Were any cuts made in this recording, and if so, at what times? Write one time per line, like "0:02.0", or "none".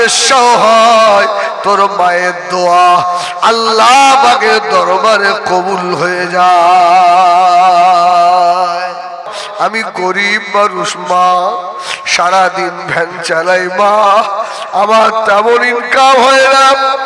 0:09.3